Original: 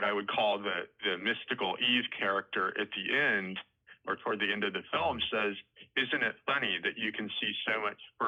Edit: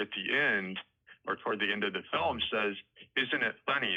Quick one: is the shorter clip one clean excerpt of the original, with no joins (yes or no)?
yes